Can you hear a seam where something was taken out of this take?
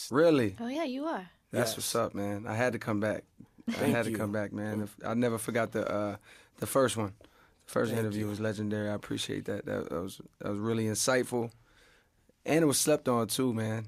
no; 0 cuts

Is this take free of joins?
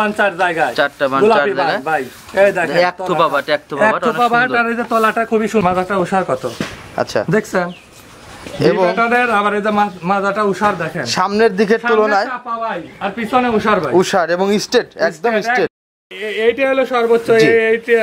no; 2 cuts; at 5.6 s, 16.1 s

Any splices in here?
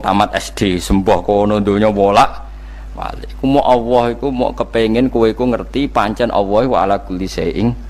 no; 0 cuts

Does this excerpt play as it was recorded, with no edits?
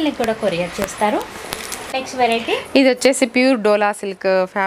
yes; 0 cuts

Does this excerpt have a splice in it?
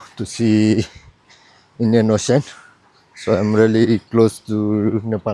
no; 0 cuts

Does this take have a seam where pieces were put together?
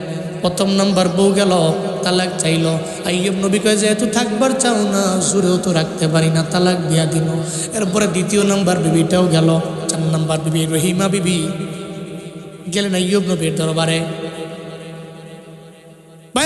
yes; 1 cut; at 9.8 s

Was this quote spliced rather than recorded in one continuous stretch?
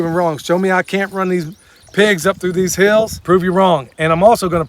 yes; 1 cut; at 3.2 s

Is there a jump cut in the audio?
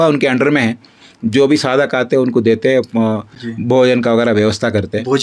no; 0 cuts

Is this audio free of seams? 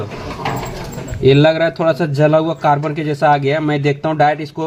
yes; 0 cuts

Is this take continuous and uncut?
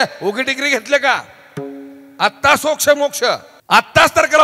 no; 1 cut; at 3.5 s

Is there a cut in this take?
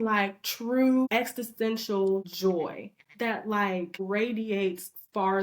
yes; 3 cuts; at 1.1 s, 2.3 s, 4.0 s

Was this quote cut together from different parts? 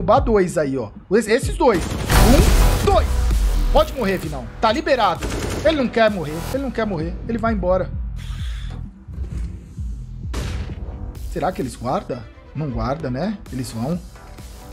no; 0 cuts

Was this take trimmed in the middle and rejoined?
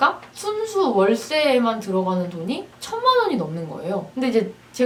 no; 0 cuts

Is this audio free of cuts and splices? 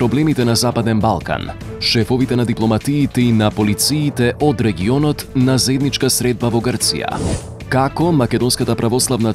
no; 1 cut; at 7.6 s

